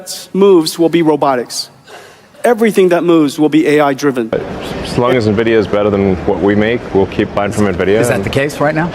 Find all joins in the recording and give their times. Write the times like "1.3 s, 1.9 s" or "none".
4.3 s